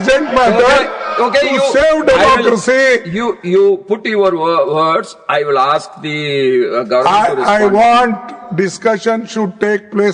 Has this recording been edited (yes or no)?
no